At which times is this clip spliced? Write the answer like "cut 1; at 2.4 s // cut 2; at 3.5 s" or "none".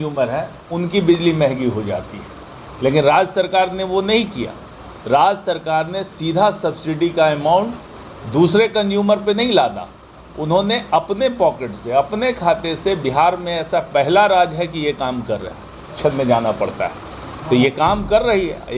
cut 1; at 16.0 s